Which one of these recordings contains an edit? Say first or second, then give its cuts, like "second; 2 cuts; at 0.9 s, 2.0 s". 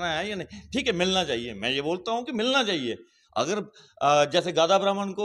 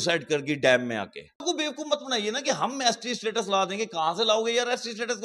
second; 1 cut; at 1.4 s